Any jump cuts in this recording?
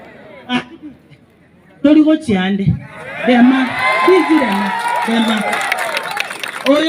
no; 0 cuts

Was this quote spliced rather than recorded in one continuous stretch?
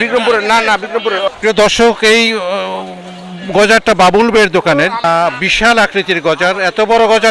yes; 2 cuts; at 1.3 s, 5.0 s

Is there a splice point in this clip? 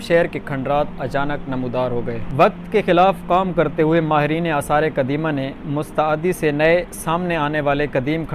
no; 0 cuts

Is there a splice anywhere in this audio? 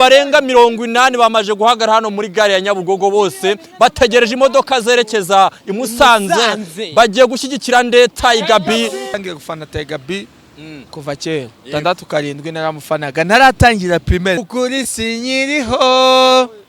yes; 2 cuts; at 9.1 s, 14.4 s

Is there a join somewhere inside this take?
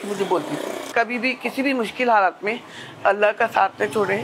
yes; 1 cut; at 0.9 s

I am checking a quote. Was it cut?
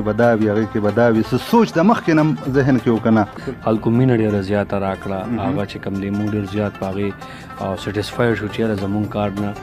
yes; 1 cut; at 3.5 s

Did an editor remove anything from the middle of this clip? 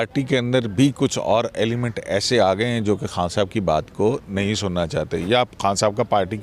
no; 0 cuts

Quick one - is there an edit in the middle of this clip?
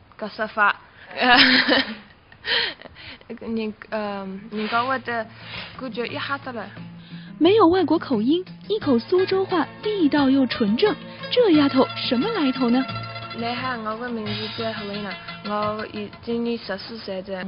yes; 1 cut; at 8.2 s

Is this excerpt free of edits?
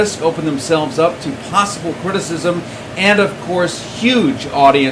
no; 1 cut; at 1.0 s

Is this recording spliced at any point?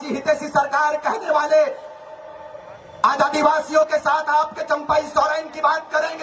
no; 0 cuts

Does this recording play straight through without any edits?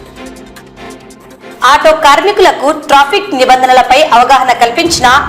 no; 1 cut; at 1.1 s

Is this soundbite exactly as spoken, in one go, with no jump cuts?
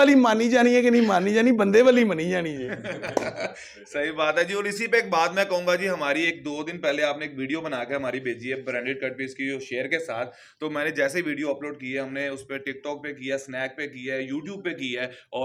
yes; 0 cuts

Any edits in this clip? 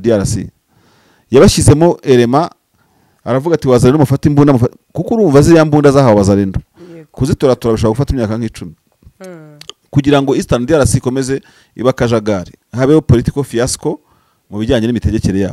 no; 0 cuts

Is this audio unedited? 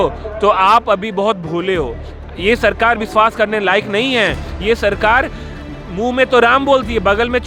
yes; 0 cuts

